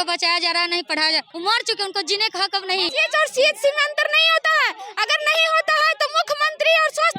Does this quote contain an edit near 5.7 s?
no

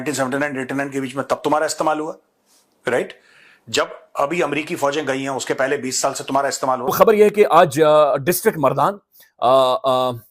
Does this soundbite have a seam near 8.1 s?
no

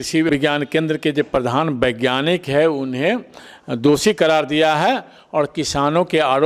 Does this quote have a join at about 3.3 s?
no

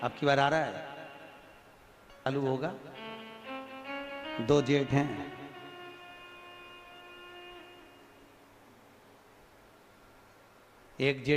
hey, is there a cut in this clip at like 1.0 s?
no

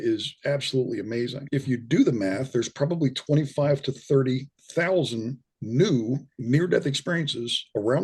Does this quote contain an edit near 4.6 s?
no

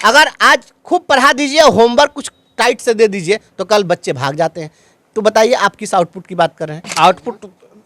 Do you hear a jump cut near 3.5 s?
no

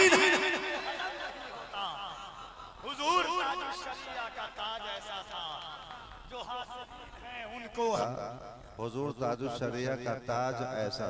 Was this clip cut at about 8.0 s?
yes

